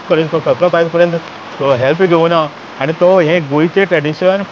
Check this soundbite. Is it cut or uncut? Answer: uncut